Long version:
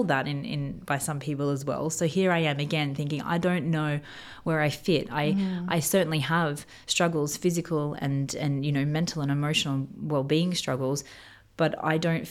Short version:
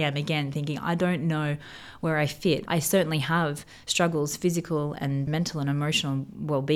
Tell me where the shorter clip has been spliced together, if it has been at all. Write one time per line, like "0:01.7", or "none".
0:02.6
0:05.3

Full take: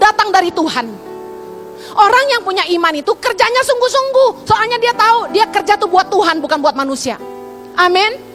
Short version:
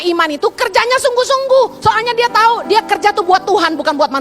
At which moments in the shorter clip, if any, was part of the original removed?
none

